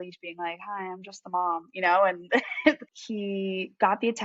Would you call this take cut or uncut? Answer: cut